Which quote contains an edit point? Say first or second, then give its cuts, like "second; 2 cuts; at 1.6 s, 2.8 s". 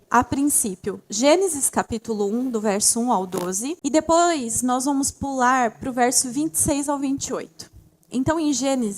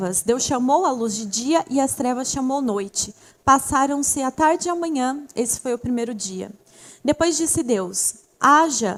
first; 1 cut; at 3.8 s